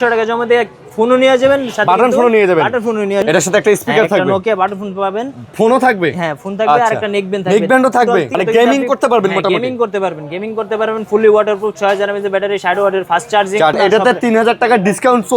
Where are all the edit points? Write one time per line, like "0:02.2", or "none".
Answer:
0:03.2
0:08.3
0:13.8